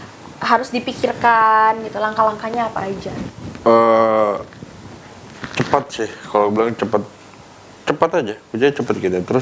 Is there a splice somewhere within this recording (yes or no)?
no